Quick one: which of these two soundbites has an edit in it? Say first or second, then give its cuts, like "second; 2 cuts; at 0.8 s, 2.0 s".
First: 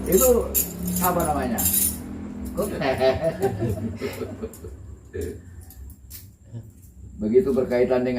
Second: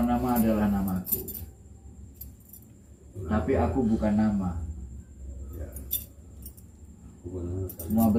first; 1 cut; at 2.5 s